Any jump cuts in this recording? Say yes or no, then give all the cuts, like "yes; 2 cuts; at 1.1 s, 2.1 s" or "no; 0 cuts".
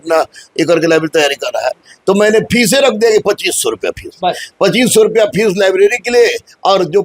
no; 0 cuts